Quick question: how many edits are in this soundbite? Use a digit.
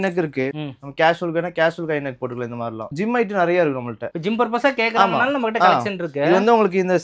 1